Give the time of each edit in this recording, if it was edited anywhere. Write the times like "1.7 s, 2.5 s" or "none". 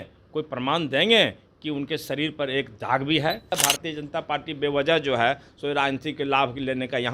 3.5 s